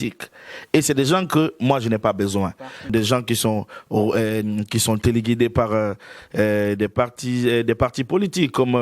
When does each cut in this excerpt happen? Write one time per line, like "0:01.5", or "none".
0:02.9